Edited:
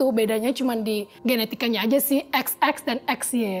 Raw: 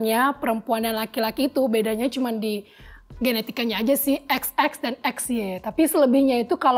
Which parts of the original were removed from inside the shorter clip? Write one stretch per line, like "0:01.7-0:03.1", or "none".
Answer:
0:02.7-0:03.1